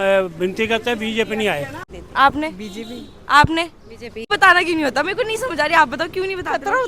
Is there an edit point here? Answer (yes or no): yes